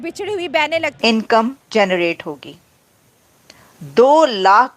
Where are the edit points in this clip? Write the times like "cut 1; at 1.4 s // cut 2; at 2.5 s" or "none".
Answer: cut 1; at 0.9 s